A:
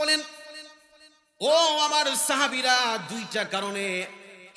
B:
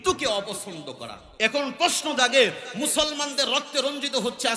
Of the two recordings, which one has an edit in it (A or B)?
B